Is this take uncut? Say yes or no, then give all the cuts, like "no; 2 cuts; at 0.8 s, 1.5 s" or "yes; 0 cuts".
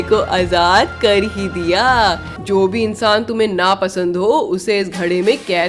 no; 1 cut; at 2.3 s